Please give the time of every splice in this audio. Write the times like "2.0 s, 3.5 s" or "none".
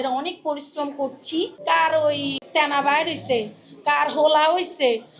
1.6 s, 2.4 s

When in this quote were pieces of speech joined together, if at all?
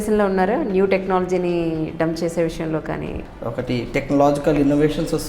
3.2 s

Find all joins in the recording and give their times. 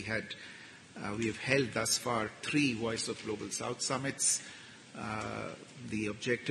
none

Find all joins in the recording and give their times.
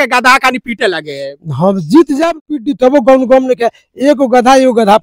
2.3 s

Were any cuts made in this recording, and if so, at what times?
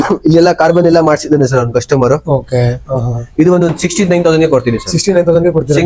none

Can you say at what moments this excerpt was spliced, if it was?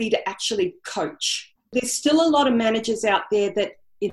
1.6 s

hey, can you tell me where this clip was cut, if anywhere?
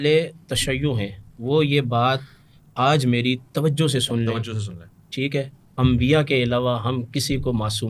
none

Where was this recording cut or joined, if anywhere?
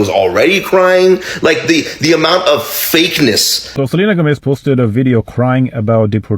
3.6 s

